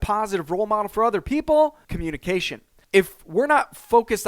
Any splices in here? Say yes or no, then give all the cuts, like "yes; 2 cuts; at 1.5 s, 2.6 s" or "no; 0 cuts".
yes; 1 cut; at 2.3 s